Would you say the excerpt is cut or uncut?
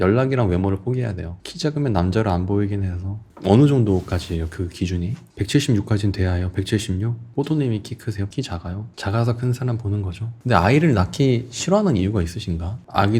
cut